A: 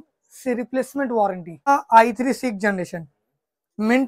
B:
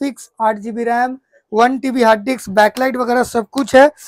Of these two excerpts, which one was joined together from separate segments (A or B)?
A